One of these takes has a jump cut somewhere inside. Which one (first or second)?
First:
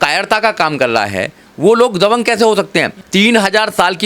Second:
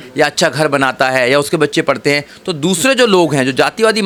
first